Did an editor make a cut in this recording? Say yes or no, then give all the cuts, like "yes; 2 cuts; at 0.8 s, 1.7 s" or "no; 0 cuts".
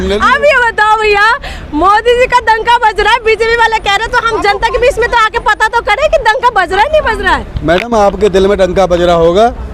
no; 0 cuts